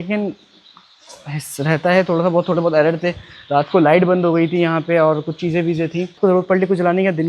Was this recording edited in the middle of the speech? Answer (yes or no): yes